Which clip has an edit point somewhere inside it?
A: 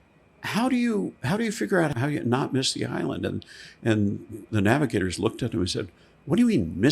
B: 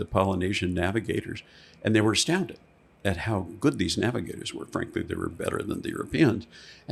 A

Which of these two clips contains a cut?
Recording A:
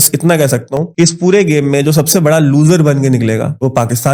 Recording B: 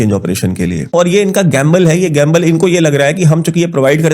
B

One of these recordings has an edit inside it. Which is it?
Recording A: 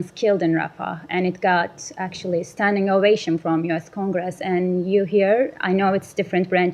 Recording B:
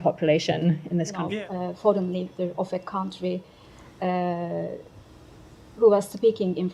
B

